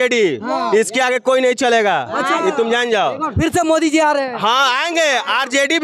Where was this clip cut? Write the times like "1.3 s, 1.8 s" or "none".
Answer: none